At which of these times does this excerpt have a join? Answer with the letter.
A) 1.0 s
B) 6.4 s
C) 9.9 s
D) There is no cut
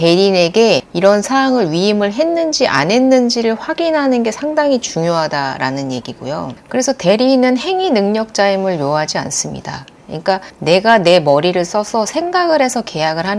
D